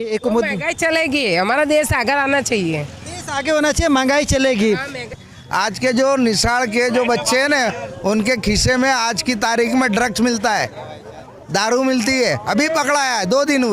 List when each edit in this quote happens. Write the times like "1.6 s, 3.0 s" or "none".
5.3 s